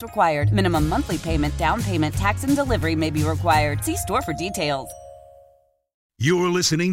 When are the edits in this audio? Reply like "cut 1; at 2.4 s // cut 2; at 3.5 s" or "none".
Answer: cut 1; at 6.0 s